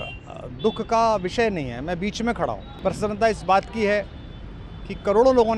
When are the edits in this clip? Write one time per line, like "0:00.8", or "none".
0:02.7